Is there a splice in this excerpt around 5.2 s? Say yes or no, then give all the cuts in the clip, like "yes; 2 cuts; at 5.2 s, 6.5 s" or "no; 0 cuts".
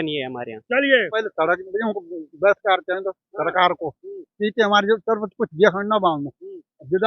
no; 1 cut; at 1.1 s